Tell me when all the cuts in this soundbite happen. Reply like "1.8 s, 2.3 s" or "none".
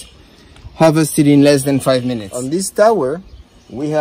2.3 s